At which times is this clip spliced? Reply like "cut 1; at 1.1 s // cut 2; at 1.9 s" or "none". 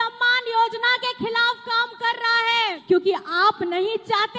cut 1; at 2.8 s